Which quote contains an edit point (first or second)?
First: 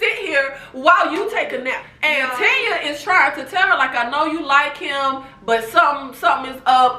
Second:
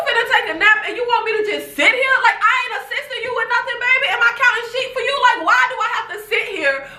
first